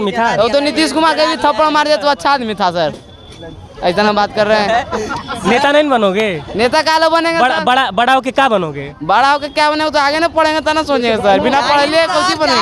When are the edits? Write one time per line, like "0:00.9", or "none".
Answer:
none